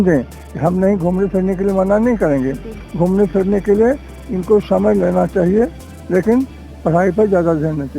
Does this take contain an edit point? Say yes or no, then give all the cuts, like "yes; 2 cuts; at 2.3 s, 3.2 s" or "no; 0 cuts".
no; 0 cuts